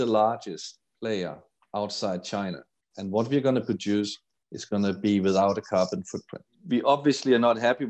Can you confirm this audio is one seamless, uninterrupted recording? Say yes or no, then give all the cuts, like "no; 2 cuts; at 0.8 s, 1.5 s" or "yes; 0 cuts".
no; 1 cut; at 6.6 s